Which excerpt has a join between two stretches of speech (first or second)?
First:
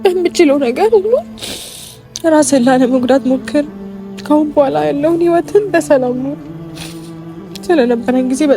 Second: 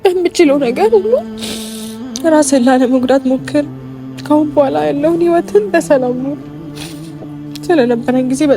second